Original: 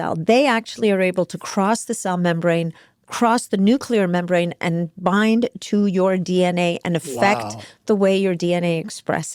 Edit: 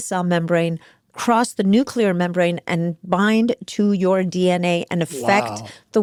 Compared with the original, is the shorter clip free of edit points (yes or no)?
yes